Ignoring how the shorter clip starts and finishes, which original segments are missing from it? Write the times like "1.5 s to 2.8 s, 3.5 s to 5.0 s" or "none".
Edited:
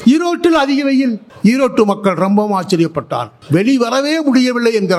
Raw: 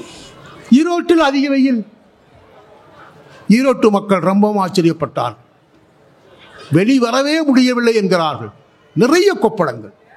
1.9 s to 3.3 s, 5.4 s to 6.6 s

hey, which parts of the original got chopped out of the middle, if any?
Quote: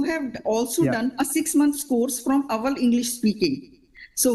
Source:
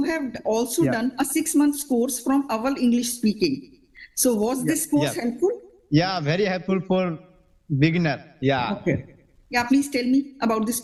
none

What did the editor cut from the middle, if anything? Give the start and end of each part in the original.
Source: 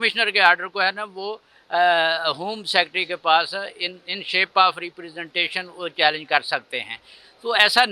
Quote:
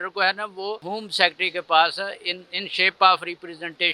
1.5 s to 2.5 s

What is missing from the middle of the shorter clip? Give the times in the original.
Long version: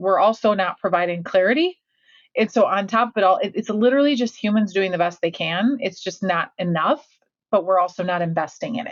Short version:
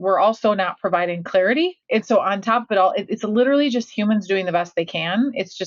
1.8 s to 2.3 s

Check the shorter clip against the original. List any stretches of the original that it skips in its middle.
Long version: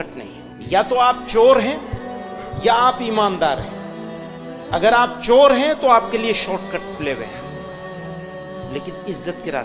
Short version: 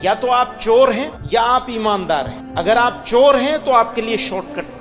1.8 s to 2.5 s, 3.7 s to 4.6 s

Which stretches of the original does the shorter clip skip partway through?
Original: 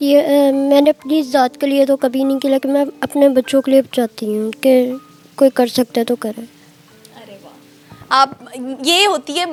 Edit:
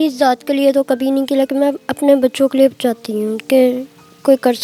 none

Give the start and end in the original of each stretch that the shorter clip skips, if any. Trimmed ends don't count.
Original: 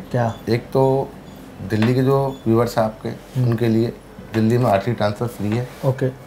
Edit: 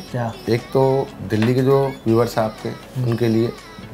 1.2 s to 1.6 s

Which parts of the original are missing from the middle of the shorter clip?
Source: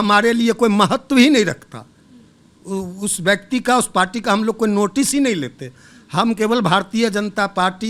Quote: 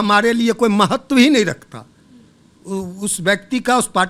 none

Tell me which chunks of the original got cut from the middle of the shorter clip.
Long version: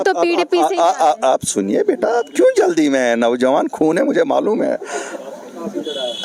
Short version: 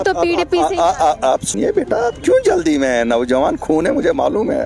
1.5 s to 1.6 s

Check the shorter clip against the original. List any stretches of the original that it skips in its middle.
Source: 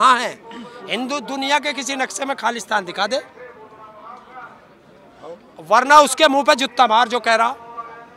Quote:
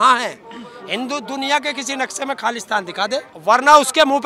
3.3 s to 5.6 s

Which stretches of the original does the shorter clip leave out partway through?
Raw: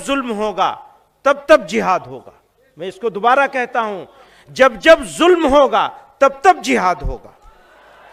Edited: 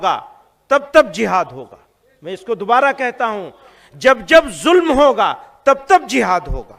none

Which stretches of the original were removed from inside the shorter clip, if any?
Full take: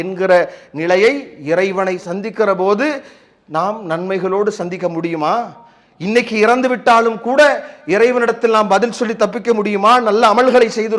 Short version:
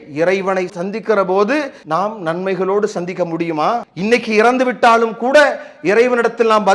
3.1 s to 3.4 s, 5.5 s to 5.9 s

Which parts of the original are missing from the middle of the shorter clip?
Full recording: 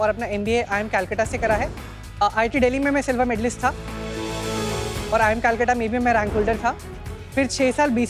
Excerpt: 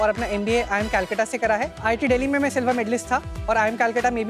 1.8 s to 2.3 s, 3.9 s to 5.0 s

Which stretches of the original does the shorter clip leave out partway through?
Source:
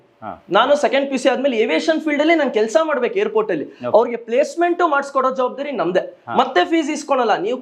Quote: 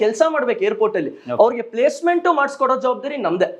none

